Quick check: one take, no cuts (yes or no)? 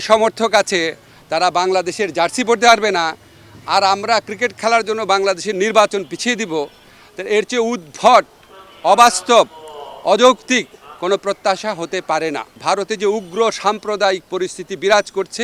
no